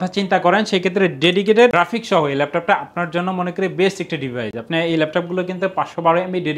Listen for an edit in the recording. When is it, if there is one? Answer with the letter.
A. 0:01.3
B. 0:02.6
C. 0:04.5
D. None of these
D